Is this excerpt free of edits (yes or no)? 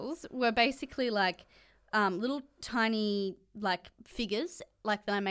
yes